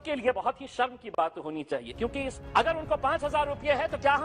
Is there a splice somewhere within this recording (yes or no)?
yes